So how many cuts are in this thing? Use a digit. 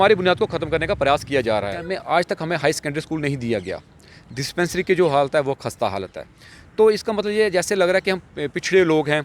1